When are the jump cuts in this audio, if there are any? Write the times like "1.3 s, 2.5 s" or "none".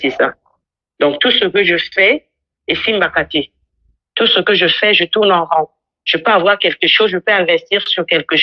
none